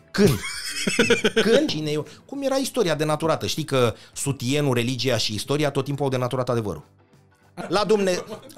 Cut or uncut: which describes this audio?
cut